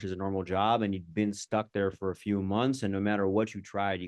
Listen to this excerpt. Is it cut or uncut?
uncut